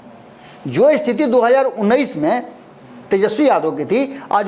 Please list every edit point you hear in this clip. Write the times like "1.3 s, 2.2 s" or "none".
none